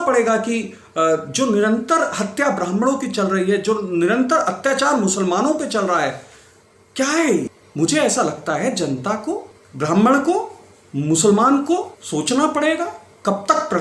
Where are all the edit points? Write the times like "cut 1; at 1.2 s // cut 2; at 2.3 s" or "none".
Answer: cut 1; at 7.6 s // cut 2; at 9.6 s // cut 3; at 12.0 s